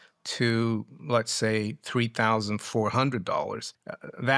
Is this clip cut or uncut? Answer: uncut